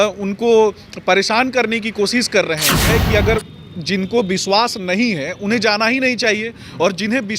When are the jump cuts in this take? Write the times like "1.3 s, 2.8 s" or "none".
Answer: 2.9 s